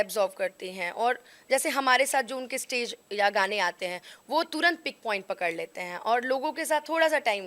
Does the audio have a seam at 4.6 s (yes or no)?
no